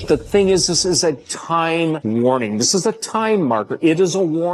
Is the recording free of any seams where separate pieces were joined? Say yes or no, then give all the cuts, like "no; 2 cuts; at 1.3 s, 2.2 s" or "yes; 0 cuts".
no; 1 cut; at 2.0 s